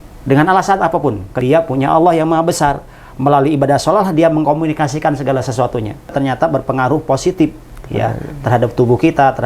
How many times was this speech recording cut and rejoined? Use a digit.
2